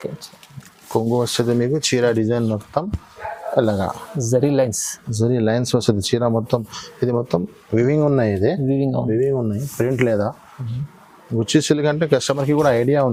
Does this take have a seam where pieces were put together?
no; 0 cuts

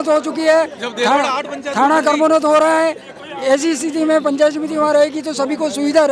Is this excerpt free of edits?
yes; 0 cuts

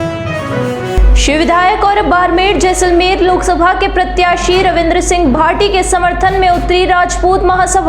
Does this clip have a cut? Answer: no; 0 cuts

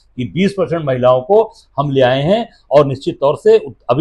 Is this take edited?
no; 0 cuts

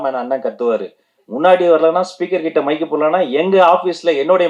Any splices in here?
no; 0 cuts

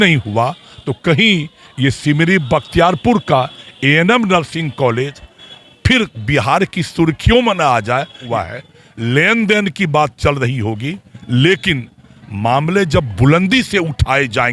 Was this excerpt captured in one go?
no; 1 cut; at 8.2 s

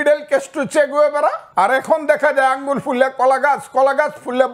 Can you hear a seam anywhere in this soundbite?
yes; 1 cut; at 1.4 s

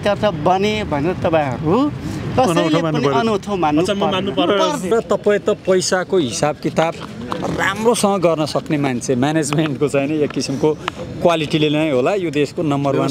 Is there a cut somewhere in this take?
no; 0 cuts

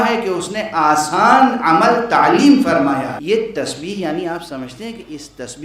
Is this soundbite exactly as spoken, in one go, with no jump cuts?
no; 1 cut; at 3.2 s

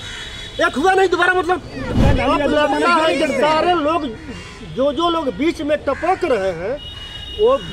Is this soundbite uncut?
no; 1 cut; at 2.0 s

